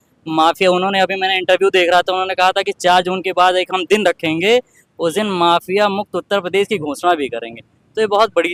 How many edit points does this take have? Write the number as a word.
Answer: zero